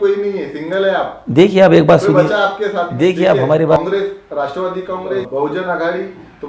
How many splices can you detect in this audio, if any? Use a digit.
2